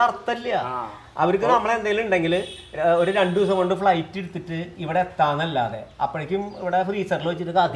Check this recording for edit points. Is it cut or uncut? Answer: uncut